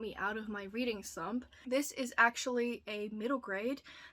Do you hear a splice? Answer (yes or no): yes